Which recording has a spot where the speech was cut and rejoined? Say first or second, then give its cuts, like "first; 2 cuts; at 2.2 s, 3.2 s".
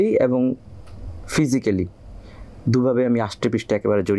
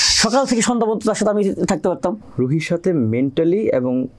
second; 1 cut; at 2.2 s